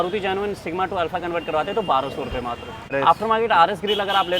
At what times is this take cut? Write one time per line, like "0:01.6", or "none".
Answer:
0:02.9